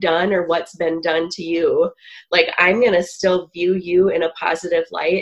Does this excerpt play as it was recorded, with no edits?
yes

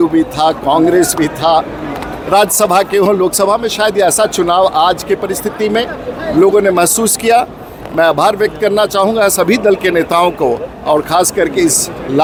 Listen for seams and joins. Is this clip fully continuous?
yes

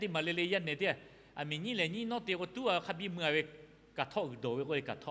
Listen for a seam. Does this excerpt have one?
no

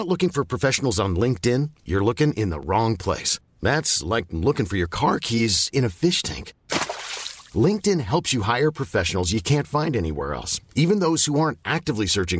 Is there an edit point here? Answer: no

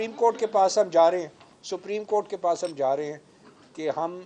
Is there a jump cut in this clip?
no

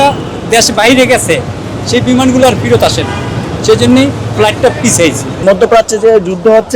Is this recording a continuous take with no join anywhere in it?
no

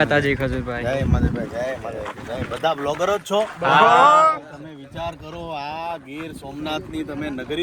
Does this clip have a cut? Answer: no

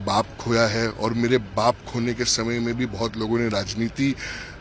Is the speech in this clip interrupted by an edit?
no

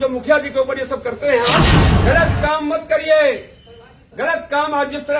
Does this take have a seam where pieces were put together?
yes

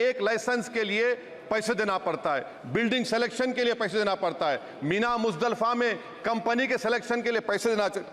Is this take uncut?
yes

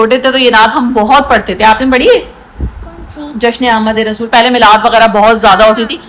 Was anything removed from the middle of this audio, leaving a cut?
no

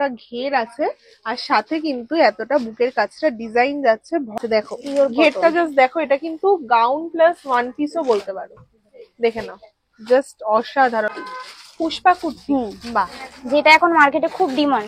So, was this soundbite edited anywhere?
yes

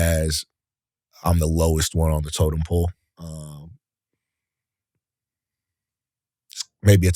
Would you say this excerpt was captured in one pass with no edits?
yes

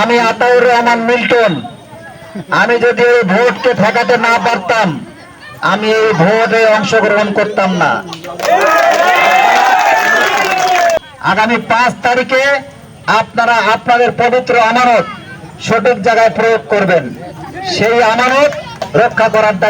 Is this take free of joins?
no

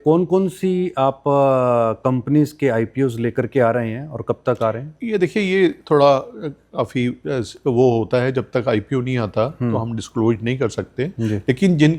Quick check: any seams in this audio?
no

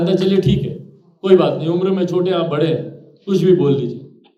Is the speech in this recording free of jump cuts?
yes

